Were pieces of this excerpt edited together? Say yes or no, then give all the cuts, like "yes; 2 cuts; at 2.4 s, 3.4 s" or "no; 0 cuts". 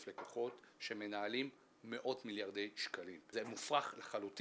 yes; 1 cut; at 3.2 s